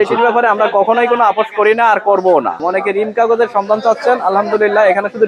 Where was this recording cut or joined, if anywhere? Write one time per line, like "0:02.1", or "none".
0:02.7